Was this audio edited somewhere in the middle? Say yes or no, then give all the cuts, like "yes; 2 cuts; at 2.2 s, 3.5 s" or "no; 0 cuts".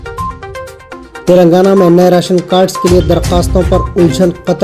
yes; 1 cut; at 1.1 s